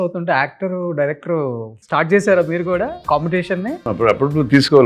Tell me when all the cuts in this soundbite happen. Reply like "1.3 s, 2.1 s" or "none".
1.7 s, 3.0 s, 3.8 s